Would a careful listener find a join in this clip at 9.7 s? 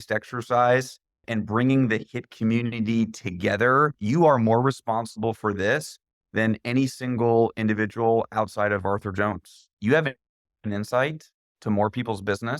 yes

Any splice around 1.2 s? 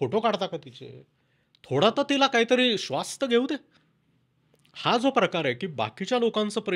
no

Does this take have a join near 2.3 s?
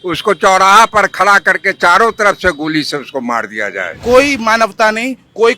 no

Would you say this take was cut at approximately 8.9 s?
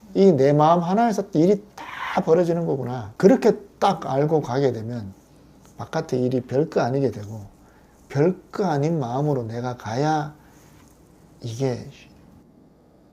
no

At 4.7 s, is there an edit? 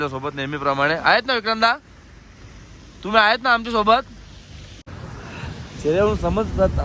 yes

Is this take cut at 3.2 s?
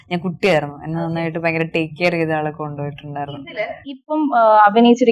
no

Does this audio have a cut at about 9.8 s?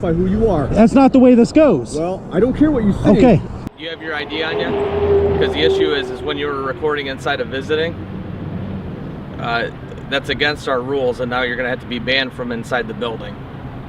no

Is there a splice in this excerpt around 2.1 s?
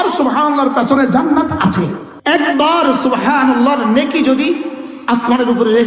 yes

